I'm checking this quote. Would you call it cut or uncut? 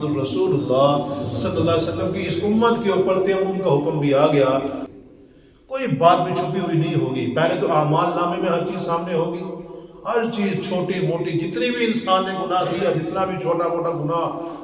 cut